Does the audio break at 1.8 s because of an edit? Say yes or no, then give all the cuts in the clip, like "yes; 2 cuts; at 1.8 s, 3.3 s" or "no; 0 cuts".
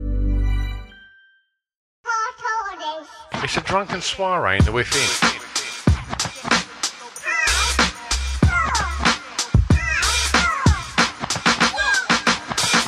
yes; 1 cut; at 1.8 s